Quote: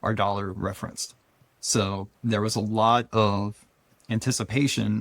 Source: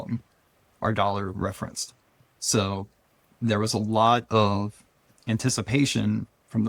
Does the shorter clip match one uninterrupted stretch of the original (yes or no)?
no